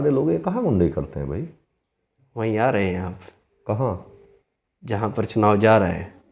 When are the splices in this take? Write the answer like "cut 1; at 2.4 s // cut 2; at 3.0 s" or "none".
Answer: none